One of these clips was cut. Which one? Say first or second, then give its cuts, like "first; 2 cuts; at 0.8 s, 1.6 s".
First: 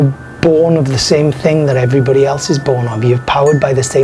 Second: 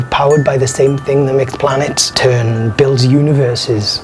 second; 1 cut; at 2.0 s